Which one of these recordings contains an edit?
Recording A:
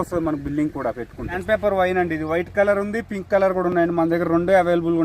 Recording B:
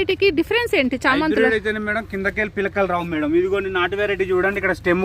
A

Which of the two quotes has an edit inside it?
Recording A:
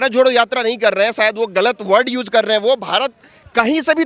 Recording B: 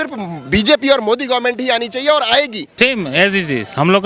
B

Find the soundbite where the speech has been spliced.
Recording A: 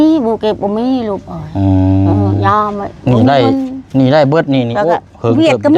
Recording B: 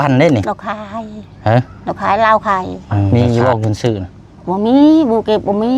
B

